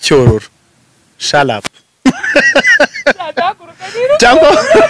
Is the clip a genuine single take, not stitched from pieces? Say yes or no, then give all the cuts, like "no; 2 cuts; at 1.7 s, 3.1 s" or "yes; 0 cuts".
yes; 0 cuts